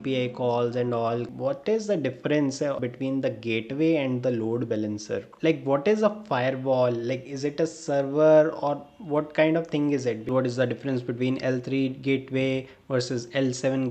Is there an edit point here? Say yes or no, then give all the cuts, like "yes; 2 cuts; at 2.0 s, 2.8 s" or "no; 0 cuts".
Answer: yes; 3 cuts; at 1.3 s, 5.3 s, 10.3 s